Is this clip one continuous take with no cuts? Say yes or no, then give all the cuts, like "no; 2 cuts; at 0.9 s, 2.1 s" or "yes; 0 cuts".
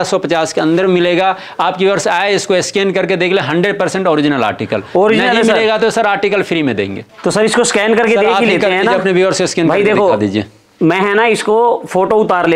yes; 0 cuts